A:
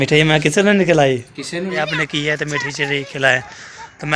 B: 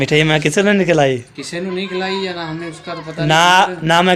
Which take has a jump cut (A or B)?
A